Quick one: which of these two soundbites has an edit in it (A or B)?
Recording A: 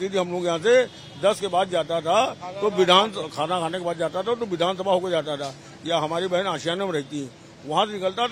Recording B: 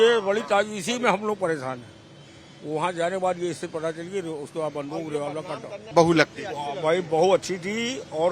B